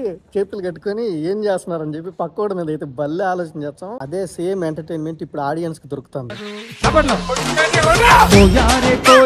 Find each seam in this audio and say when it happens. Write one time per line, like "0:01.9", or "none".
0:03.9
0:06.5